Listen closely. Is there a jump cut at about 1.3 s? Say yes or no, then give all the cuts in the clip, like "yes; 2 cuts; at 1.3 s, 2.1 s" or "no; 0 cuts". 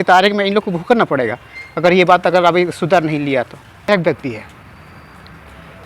no; 1 cut; at 3.9 s